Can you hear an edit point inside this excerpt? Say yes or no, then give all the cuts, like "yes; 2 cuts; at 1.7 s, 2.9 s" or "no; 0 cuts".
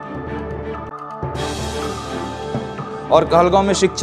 yes; 2 cuts; at 0.9 s, 2.4 s